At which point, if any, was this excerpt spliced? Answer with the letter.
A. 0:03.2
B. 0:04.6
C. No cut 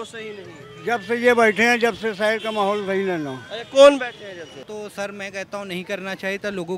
B